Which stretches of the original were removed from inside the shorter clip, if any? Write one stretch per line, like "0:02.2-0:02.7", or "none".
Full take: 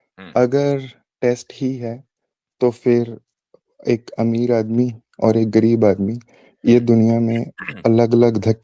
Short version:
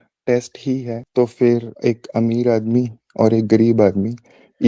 0:01.9-0:02.4
0:03.2-0:03.7